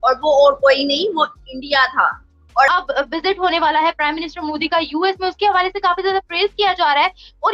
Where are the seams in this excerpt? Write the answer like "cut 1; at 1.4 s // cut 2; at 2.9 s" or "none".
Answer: cut 1; at 2.7 s